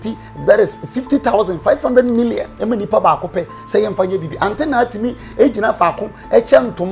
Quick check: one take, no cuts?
no; 1 cut; at 2.5 s

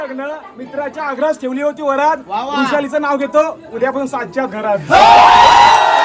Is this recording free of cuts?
yes; 0 cuts

